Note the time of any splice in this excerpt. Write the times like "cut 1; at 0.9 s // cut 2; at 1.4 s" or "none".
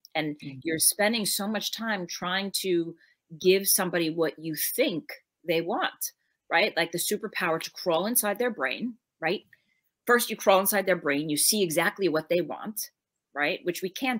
none